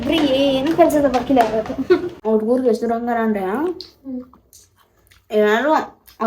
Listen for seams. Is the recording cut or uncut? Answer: cut